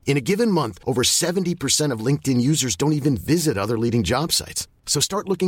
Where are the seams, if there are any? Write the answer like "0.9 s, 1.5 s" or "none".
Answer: none